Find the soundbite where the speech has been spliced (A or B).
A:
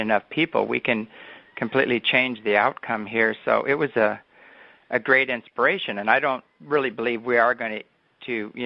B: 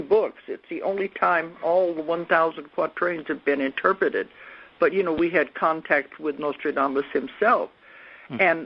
A